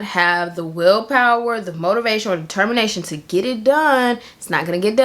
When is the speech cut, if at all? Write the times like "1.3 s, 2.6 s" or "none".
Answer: none